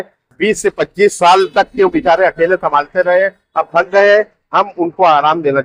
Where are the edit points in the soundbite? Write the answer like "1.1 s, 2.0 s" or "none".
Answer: none